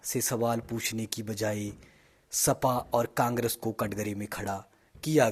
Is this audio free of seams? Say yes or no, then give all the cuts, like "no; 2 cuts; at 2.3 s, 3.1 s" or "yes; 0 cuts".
yes; 0 cuts